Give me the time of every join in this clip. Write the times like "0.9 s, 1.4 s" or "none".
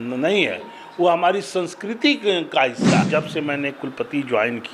3.1 s